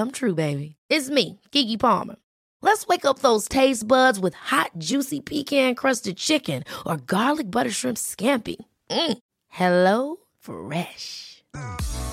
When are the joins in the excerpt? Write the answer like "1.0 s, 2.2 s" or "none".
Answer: none